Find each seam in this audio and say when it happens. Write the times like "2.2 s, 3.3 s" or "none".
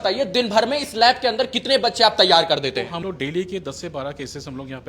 3.0 s